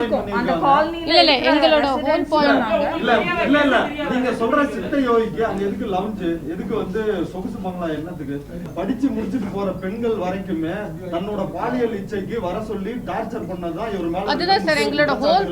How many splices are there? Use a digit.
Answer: 1